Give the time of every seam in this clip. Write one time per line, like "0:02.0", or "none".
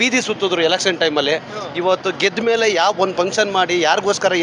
none